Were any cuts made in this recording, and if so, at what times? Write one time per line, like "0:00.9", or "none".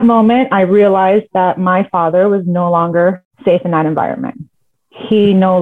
0:03.3